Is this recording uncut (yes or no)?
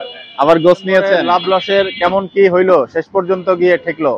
no